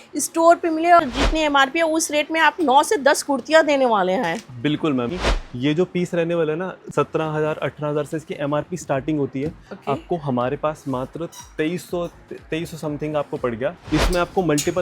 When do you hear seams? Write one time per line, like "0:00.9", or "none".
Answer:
0:01.0
0:05.1
0:13.8